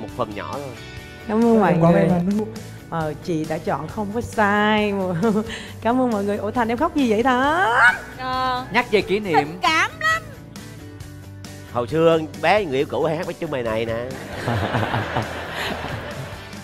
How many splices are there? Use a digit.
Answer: 1